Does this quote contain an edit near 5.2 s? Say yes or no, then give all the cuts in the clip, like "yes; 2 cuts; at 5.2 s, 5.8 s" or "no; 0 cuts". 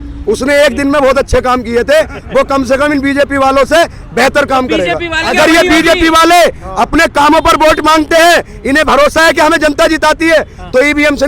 yes; 1 cut; at 5.2 s